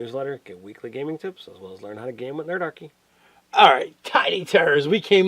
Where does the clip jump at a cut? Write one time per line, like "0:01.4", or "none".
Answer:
0:04.0